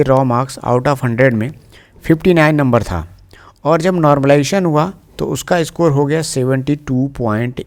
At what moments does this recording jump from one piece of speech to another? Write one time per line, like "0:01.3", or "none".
none